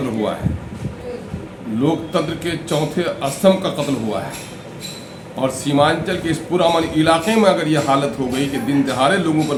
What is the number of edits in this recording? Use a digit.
0